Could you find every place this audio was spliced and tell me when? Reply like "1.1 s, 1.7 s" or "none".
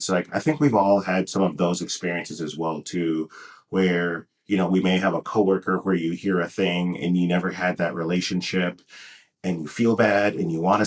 none